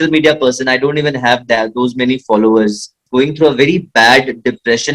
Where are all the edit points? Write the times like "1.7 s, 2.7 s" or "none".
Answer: 3.0 s